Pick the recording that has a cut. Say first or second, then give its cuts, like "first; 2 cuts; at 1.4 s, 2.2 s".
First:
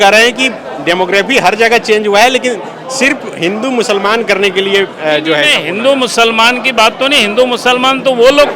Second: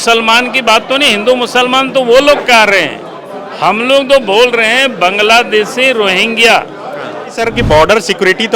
second; 1 cut; at 7.3 s